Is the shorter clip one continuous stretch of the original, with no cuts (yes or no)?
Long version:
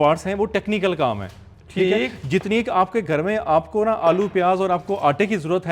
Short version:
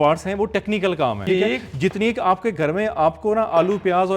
no